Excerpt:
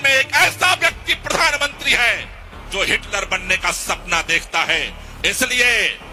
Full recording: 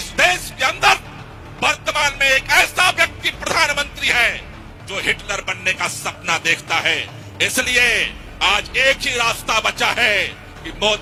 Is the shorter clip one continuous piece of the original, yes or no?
yes